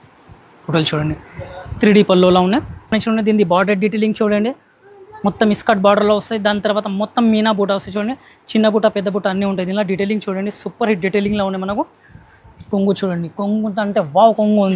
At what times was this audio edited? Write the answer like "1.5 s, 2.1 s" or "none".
2.9 s